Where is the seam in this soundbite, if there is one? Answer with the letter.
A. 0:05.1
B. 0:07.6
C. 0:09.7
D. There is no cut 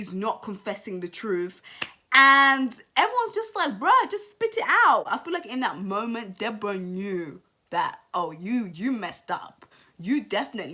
A